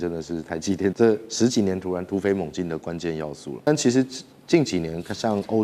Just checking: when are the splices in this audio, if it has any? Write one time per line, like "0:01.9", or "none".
0:00.9
0:03.7